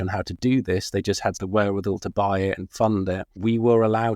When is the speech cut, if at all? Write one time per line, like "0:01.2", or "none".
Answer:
0:01.4
0:03.3